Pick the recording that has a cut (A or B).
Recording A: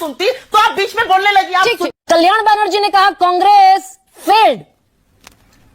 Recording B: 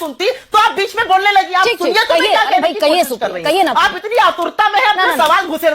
A